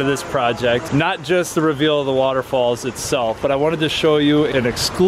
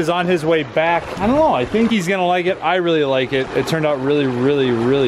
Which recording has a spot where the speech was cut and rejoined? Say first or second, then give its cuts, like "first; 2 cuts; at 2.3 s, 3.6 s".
second; 1 cut; at 1.1 s